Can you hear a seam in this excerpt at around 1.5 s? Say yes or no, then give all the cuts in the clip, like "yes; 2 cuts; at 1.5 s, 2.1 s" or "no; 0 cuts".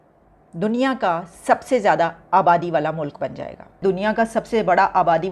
no; 1 cut; at 3.8 s